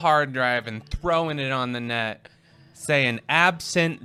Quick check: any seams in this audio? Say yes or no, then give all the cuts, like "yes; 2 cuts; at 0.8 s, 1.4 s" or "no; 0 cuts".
no; 0 cuts